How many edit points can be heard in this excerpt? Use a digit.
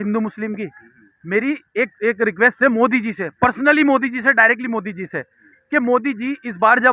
0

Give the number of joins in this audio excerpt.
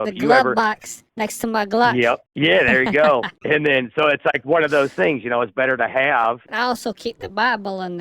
2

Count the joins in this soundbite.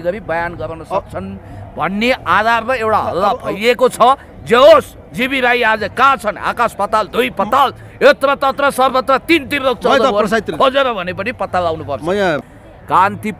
1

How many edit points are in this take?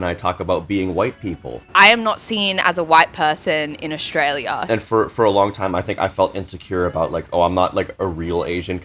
2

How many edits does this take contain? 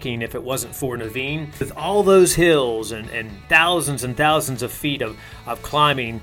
1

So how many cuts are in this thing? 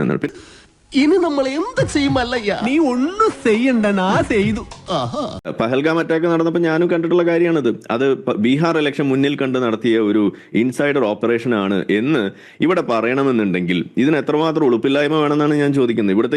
1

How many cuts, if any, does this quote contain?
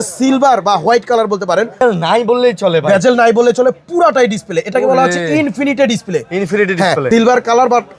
2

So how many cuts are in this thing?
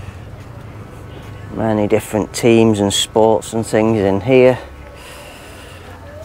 0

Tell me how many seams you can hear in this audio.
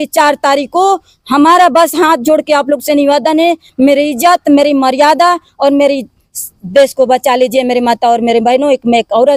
0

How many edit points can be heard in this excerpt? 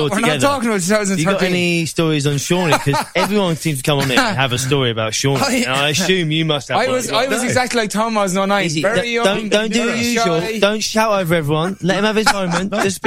0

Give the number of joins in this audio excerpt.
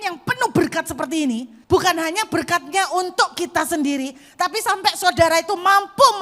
1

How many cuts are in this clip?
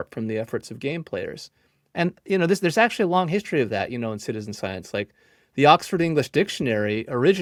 0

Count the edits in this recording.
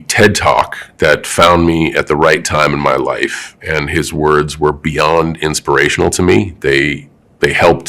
0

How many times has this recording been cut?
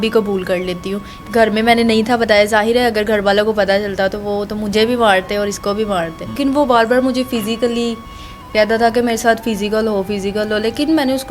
2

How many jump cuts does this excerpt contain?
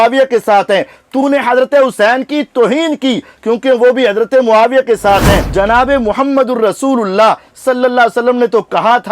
1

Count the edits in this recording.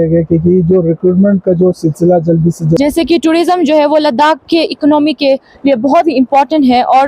1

